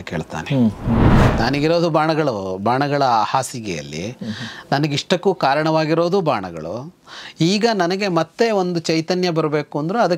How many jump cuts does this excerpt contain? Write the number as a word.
one